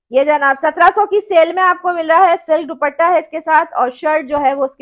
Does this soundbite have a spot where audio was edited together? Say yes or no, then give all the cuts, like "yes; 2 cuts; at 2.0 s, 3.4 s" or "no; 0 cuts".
no; 0 cuts